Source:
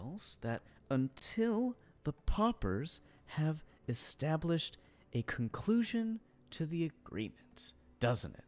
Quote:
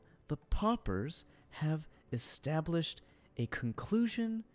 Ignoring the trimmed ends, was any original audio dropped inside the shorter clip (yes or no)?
no